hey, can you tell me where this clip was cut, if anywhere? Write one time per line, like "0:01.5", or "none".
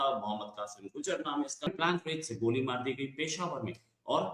0:01.7